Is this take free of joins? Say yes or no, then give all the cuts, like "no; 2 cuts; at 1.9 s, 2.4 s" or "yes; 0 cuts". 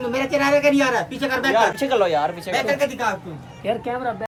yes; 0 cuts